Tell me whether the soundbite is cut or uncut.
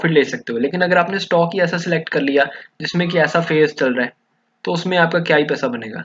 uncut